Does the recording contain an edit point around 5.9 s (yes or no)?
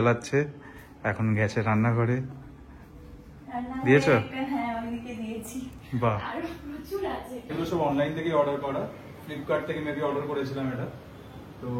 no